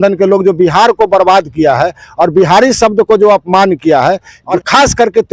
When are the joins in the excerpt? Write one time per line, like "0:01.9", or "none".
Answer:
0:04.4